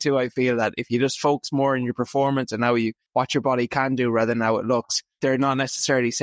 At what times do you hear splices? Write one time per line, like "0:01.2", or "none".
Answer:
0:03.0
0:05.0